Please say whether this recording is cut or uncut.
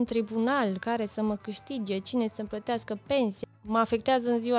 cut